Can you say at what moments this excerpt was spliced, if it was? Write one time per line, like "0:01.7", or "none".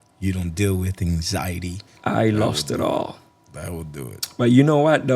0:01.8

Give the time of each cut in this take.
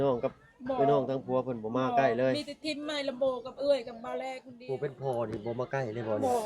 0:04.5

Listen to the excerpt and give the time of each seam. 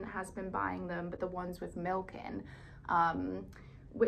none

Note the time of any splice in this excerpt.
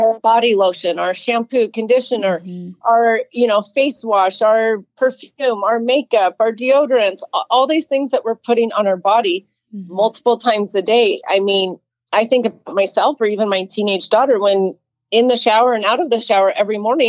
none

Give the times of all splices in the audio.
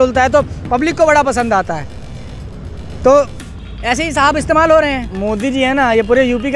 0:05.1

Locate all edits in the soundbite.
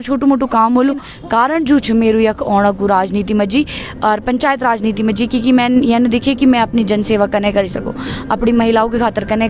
0:01.1

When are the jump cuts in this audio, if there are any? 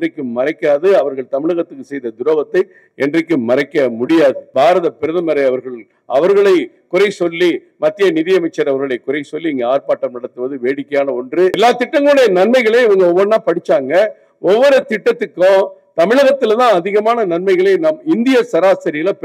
0:04.4
0:11.6

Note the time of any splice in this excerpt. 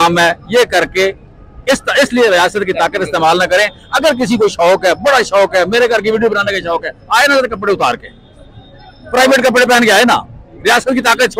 none

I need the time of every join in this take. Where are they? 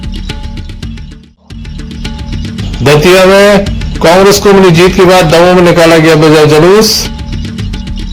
0:01.6

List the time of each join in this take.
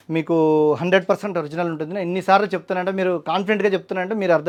none

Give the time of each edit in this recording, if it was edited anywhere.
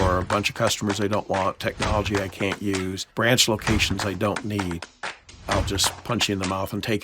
0:03.0
0:05.4

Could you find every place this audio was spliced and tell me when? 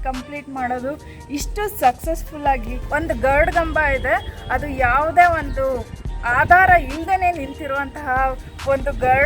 0:02.7

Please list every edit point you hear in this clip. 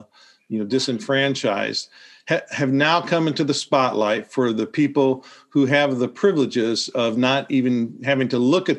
none

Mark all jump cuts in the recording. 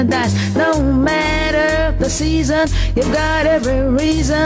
0:03.5

